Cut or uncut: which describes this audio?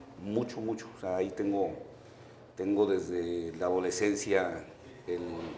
cut